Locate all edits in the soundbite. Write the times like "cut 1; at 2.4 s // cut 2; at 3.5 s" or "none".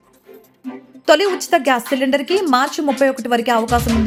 none

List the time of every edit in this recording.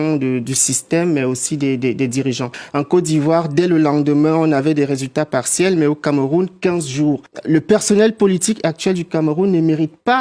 cut 1; at 2.6 s // cut 2; at 7.3 s

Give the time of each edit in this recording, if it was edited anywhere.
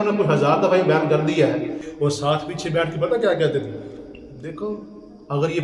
cut 1; at 1.8 s

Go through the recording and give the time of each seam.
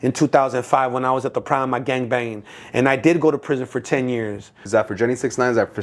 cut 1; at 4.6 s

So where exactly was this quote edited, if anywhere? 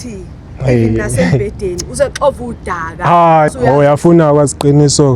cut 1; at 3.5 s

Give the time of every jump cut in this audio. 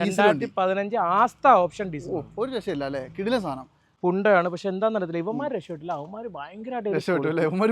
cut 1; at 3.8 s

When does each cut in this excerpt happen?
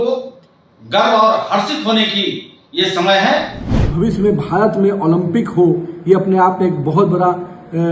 cut 1; at 3.8 s

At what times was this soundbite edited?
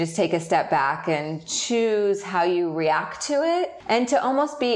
cut 1; at 3.8 s

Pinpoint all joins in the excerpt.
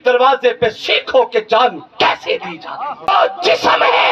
cut 1; at 3.1 s

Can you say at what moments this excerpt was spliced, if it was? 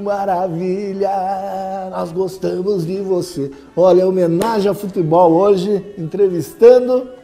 none

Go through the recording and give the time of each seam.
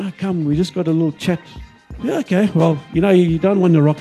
cut 1; at 1.7 s

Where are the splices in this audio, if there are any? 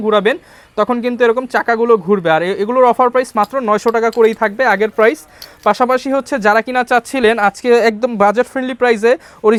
none

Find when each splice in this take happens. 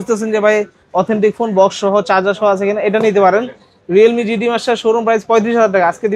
none

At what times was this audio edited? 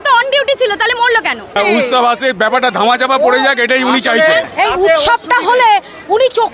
cut 1; at 1.6 s // cut 2; at 4.5 s

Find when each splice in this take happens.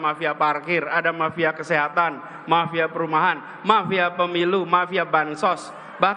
none

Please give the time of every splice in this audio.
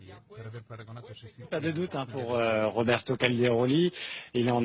none

